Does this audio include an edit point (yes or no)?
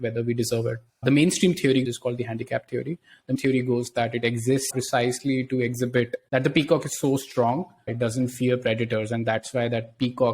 yes